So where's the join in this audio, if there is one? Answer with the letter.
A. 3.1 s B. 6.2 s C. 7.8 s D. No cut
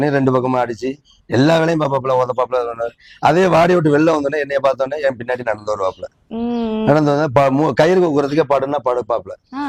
D